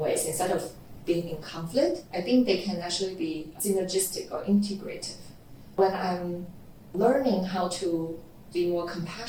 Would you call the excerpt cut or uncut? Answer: uncut